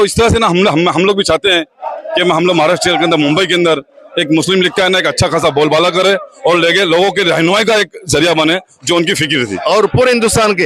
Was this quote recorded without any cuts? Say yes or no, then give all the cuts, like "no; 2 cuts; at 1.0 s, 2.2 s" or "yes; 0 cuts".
no; 1 cut; at 9.5 s